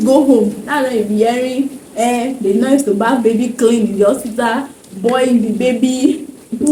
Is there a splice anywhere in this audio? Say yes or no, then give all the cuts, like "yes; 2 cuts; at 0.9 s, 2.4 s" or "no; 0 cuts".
no; 0 cuts